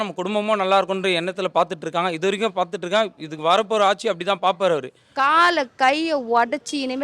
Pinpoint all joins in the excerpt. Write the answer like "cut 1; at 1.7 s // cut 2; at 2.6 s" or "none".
cut 1; at 5.0 s